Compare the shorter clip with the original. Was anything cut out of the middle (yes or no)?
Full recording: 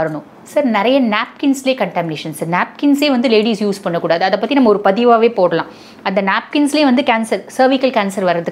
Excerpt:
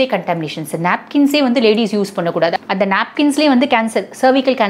yes